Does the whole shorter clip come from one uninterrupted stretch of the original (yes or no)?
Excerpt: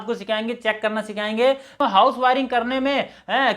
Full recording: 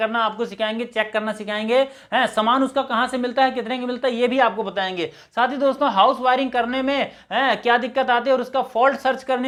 no